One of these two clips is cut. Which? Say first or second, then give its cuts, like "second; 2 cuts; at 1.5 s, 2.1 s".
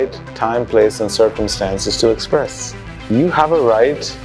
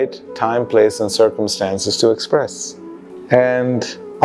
first; 1 cut; at 3.1 s